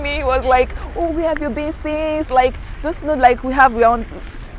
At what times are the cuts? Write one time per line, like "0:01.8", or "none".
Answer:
none